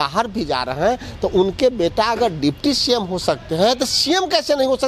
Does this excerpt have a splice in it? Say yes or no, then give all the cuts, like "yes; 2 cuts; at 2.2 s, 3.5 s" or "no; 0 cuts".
no; 0 cuts